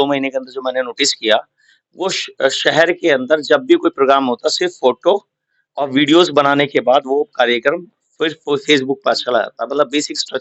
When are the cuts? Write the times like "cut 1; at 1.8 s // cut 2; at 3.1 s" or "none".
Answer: none